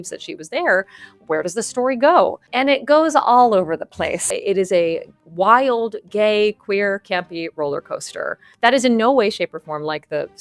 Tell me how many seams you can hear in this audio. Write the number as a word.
two